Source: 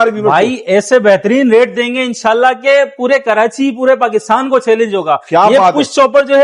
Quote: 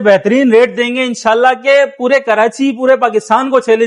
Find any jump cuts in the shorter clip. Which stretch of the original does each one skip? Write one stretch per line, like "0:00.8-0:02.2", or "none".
none

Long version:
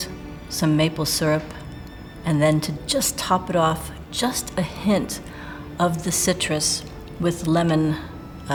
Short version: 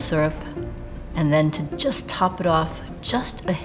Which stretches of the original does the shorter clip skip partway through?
none

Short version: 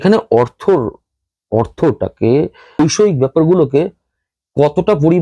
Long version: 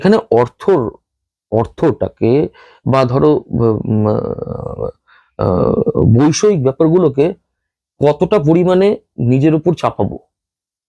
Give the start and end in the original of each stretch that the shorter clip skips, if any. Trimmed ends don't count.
0:02.8-0:06.2

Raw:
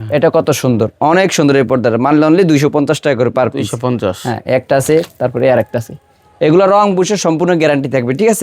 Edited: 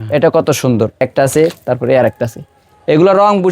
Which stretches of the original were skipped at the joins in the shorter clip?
0:01.0-0:04.5

